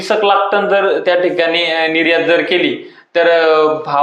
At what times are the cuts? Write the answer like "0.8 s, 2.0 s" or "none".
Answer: none